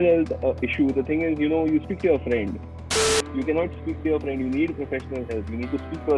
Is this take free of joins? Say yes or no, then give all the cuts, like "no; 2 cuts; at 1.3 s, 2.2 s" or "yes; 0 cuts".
no; 1 cut; at 3.1 s